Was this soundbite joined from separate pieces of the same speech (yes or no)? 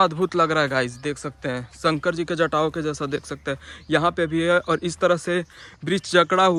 no